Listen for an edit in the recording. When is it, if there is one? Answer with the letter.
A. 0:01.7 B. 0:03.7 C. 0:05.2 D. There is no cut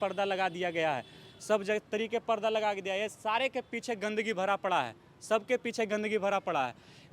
D